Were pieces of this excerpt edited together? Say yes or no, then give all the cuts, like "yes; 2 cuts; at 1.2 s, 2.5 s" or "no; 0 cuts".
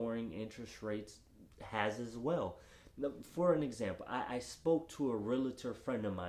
no; 0 cuts